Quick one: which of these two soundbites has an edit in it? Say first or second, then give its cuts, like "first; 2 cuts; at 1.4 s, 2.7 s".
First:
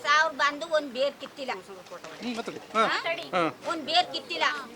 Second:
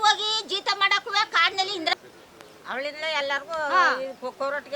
second; 1 cut; at 1.9 s